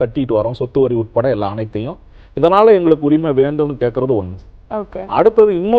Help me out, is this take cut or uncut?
uncut